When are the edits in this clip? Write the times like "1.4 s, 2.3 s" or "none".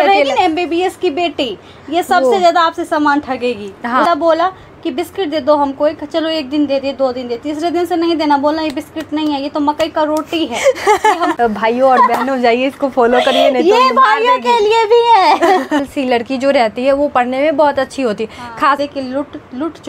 4.0 s, 11.3 s, 15.9 s, 18.8 s